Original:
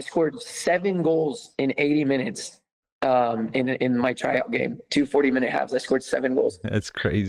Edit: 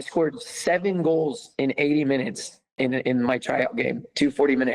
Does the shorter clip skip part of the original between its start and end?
yes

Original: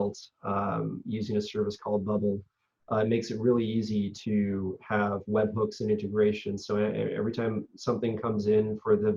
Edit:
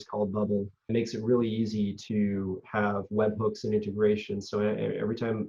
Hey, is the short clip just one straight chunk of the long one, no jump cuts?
no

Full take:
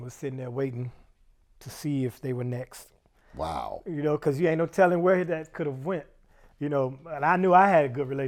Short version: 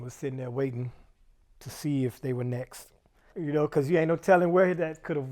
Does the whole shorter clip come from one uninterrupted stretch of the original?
no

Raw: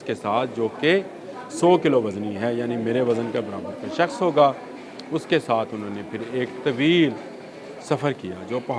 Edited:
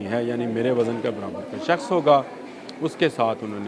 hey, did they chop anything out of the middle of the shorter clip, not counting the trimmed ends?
no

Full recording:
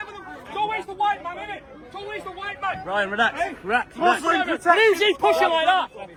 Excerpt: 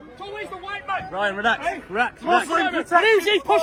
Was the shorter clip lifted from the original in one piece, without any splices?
yes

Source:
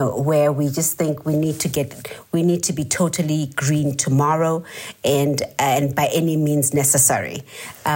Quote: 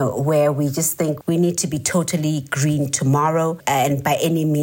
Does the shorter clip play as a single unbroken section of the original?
no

